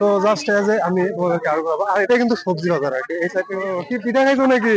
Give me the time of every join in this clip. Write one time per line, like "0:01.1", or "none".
0:03.3